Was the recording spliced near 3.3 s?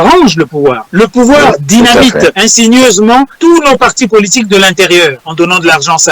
yes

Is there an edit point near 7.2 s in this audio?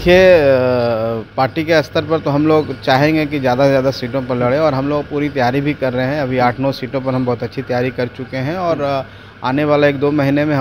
no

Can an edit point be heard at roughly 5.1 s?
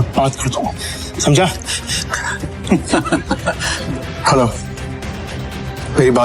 no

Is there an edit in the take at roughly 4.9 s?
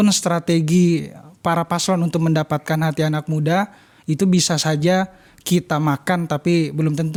no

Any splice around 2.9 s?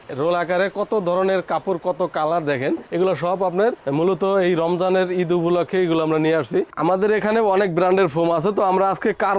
yes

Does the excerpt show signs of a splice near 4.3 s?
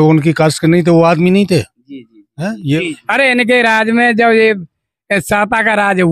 no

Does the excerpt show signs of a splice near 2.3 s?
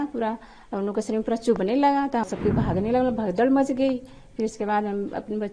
yes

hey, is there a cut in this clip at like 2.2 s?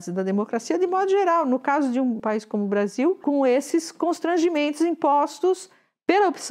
yes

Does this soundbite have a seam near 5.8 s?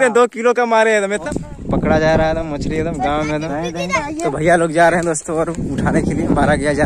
no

